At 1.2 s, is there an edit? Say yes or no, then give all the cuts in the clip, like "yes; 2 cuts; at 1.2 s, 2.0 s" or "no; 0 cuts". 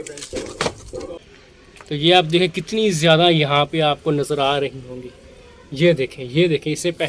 yes; 1 cut; at 1.2 s